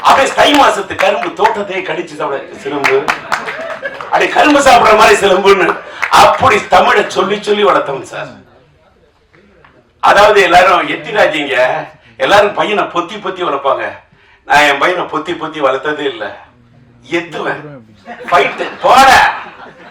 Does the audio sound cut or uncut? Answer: uncut